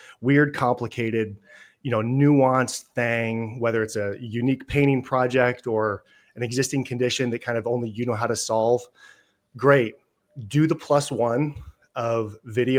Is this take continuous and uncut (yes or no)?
yes